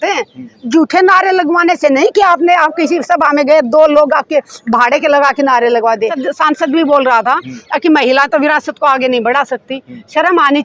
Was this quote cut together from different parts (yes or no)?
yes